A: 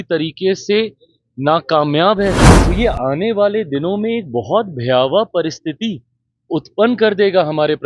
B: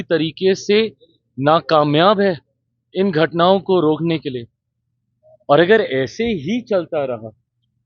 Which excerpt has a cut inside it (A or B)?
A